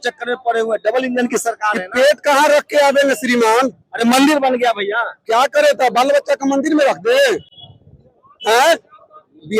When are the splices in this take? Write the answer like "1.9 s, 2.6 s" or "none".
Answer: none